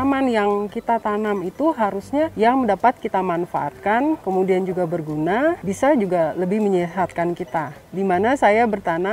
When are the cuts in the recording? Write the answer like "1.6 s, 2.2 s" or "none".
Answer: 2.3 s, 4.2 s, 5.6 s, 7.8 s